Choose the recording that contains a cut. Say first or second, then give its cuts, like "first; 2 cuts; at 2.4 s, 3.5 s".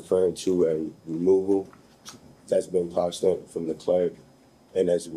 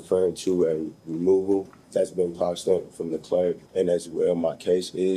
second; 2 cuts; at 1.8 s, 3.6 s